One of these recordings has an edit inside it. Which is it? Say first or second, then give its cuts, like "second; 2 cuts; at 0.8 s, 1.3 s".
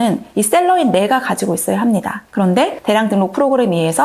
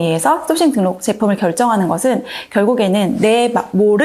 first; 1 cut; at 2.6 s